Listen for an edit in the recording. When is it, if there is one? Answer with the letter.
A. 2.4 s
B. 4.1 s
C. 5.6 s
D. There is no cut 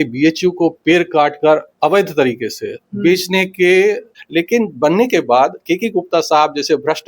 B